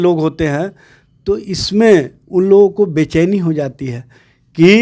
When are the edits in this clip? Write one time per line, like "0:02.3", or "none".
none

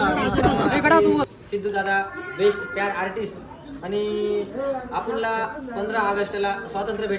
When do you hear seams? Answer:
0:01.0

